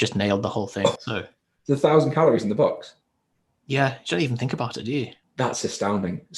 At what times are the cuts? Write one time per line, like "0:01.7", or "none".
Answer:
0:01.0
0:05.2

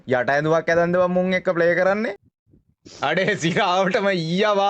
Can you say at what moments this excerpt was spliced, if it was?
0:02.2

